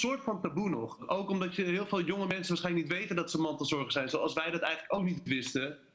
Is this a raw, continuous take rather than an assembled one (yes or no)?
no